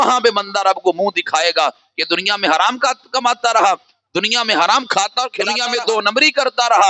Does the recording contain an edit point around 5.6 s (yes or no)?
yes